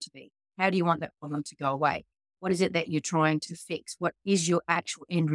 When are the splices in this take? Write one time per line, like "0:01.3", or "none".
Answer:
none